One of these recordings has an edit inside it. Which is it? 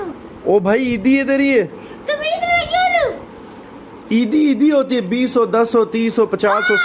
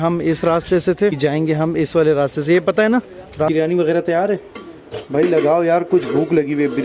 second; 2 cuts; at 1.2 s, 3.5 s

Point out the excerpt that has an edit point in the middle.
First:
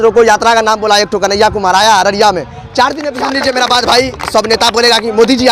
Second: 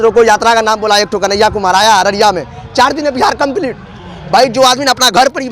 first; 1 cut; at 3.2 s

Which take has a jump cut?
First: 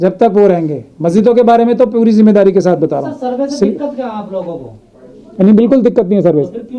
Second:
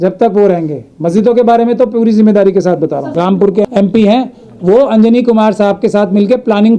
second; 1 cut; at 3.0 s

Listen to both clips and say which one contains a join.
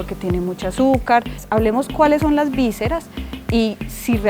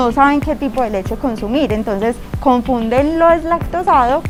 first; 1 cut; at 1.4 s

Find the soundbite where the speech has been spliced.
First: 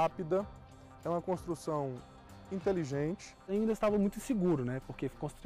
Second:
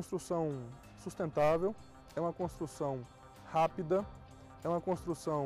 first; 1 cut; at 3.4 s

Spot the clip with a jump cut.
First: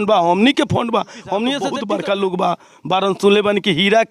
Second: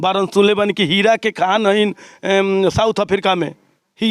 first; 1 cut; at 1.7 s

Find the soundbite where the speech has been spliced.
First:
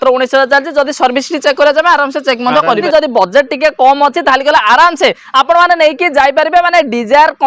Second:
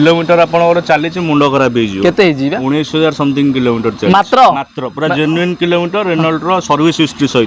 first; 1 cut; at 2.8 s

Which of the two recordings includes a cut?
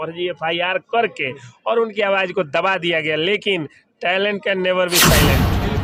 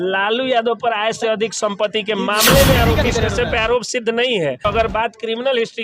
second; 2 cuts; at 3.1 s, 4.7 s

